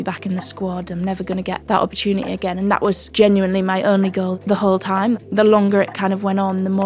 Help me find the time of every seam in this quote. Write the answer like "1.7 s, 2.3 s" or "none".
4.4 s, 5.2 s